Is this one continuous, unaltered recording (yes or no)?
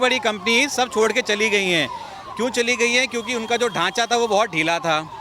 yes